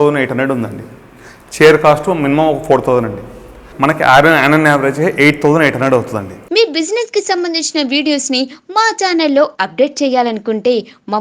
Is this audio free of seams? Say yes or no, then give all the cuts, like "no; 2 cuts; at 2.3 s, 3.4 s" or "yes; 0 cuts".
no; 2 cuts; at 3.6 s, 6.4 s